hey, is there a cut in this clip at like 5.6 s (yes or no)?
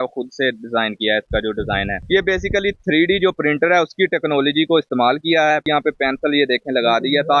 yes